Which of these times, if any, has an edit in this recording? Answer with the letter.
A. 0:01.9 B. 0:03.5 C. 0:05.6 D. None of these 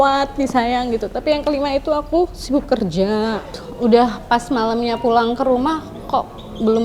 B